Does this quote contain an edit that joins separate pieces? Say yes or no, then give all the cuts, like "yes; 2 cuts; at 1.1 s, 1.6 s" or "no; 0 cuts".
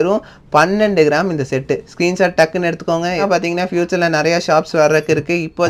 yes; 1 cut; at 3.2 s